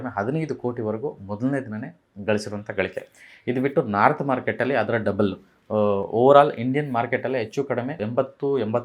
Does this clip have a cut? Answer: no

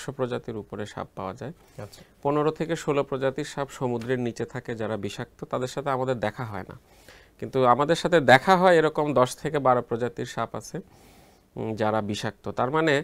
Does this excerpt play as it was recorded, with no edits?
yes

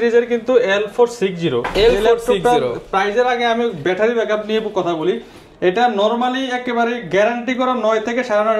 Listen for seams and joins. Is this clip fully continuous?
yes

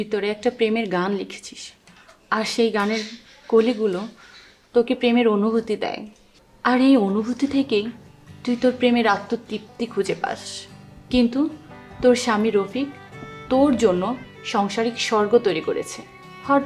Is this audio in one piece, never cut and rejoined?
yes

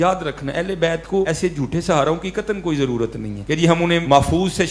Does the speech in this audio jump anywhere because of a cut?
yes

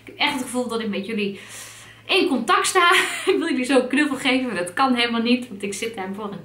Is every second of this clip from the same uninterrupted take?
yes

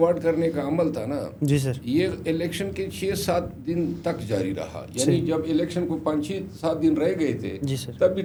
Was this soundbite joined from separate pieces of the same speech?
no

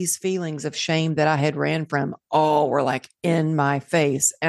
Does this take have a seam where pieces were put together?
no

